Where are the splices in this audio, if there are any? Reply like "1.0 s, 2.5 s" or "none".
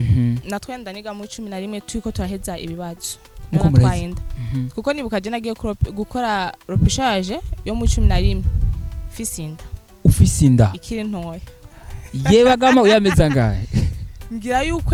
none

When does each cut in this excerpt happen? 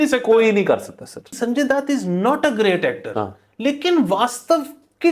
1.3 s

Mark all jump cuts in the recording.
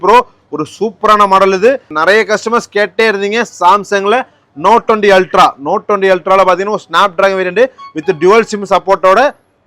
1.9 s

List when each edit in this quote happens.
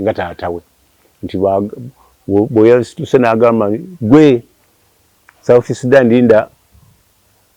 none

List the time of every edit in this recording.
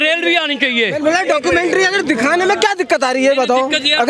none

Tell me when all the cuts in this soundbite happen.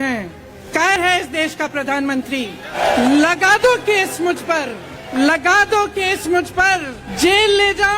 1.0 s, 2.7 s, 5.1 s, 7.0 s

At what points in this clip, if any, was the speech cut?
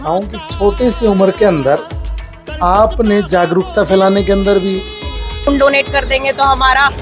5.5 s

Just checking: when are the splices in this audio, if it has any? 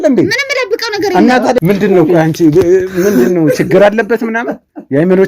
1.6 s

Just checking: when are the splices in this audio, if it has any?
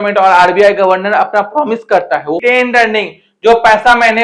2.4 s

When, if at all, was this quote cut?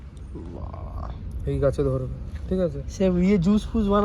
none

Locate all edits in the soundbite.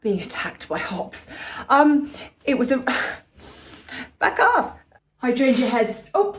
4.8 s

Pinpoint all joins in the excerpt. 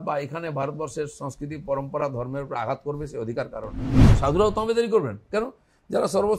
4.1 s

